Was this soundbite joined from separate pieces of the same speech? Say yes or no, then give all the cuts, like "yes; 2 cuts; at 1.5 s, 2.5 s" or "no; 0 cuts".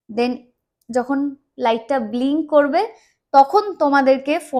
no; 0 cuts